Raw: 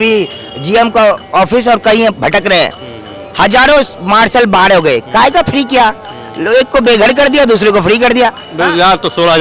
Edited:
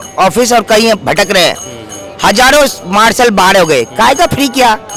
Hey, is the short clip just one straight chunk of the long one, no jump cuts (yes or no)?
yes